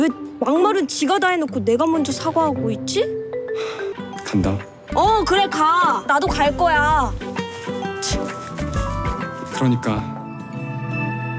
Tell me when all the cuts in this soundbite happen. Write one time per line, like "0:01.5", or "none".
0:08.9